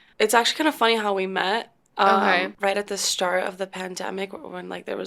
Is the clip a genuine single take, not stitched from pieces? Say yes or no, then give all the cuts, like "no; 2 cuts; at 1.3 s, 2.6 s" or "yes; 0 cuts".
no; 1 cut; at 2.5 s